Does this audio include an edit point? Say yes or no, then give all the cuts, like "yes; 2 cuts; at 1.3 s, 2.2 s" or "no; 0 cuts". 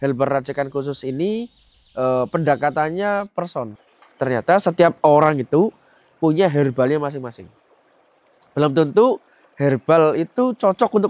yes; 1 cut; at 3.8 s